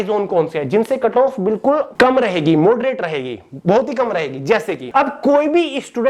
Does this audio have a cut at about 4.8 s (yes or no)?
yes